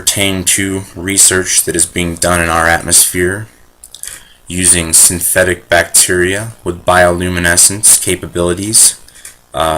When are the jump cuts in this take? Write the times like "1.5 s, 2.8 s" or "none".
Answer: 6.6 s

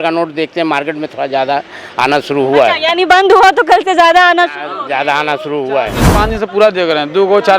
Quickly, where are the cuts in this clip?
6.0 s

